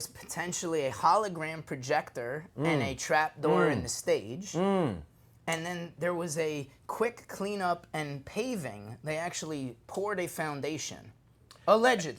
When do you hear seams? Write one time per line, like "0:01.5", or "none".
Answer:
none

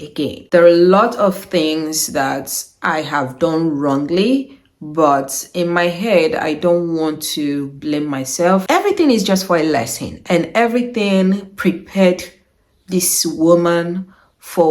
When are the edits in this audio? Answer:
0:08.6

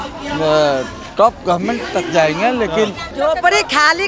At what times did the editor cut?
0:03.0

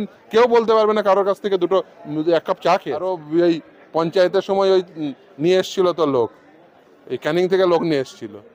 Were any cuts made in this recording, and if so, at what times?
0:03.0

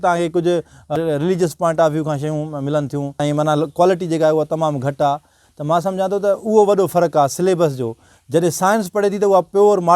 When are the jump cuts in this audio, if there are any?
0:00.9
0:03.2

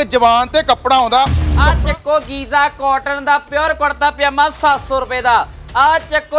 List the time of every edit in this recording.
0:01.5

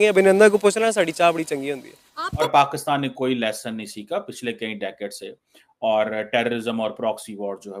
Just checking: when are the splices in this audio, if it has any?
0:02.4

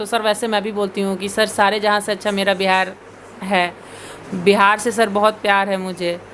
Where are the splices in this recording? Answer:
none

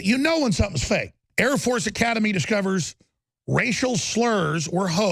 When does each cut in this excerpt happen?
0:01.2

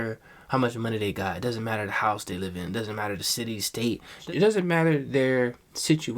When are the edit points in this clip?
0:04.2

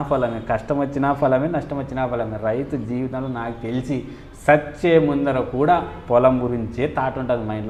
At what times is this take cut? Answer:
none

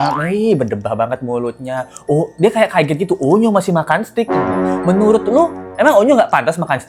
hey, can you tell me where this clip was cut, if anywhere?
none

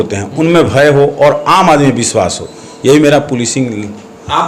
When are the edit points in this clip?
none

